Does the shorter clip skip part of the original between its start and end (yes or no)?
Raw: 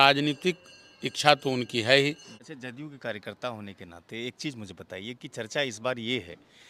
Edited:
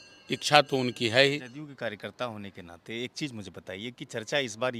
yes